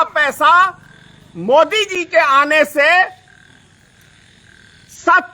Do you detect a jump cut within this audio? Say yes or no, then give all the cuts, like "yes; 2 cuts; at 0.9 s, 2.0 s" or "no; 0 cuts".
no; 0 cuts